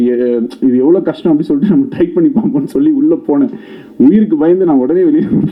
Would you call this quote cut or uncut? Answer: uncut